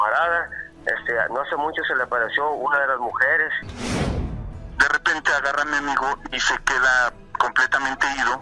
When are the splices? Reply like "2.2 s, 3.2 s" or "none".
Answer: 4.1 s, 7.2 s